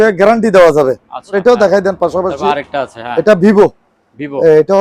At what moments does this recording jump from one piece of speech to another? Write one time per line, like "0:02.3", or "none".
0:01.3